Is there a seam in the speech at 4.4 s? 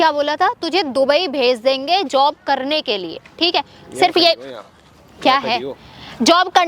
no; 0 cuts

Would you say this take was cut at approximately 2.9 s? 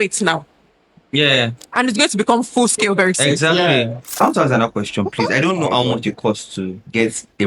no; 1 cut; at 4.2 s

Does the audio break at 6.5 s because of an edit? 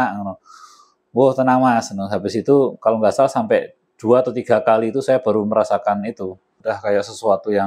yes; 1 cut; at 6.5 s

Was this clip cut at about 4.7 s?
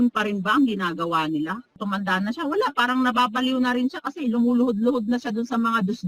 no; 1 cut; at 1.8 s

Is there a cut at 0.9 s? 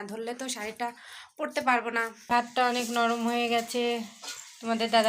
no; 1 cut; at 2.3 s

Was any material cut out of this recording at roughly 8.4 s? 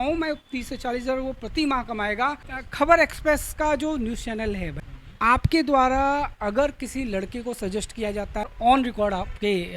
yes; 3 cuts; at 2.5 s, 4.7 s, 8.4 s

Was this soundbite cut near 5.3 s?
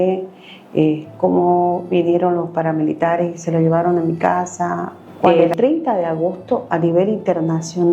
yes; 1 cut; at 5.3 s

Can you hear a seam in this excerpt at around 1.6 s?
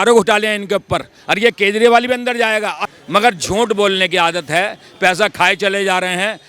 no; 1 cut; at 2.8 s

